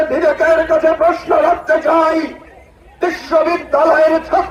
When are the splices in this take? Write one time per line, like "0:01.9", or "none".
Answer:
none